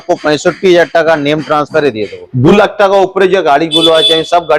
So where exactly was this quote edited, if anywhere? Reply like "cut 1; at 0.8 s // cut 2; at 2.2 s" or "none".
cut 1; at 2.5 s